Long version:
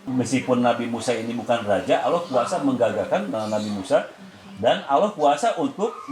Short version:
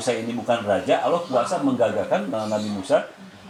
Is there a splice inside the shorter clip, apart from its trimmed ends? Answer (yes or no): no